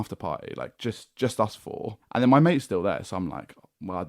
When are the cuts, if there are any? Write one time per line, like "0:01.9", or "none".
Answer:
0:02.0